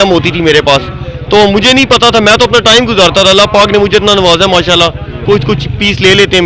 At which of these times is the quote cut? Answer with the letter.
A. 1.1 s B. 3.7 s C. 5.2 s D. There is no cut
C